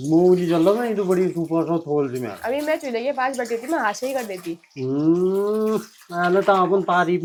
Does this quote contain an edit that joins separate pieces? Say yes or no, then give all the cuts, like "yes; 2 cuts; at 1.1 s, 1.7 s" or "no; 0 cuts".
no; 0 cuts